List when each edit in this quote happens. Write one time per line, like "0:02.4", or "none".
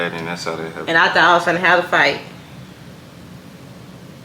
none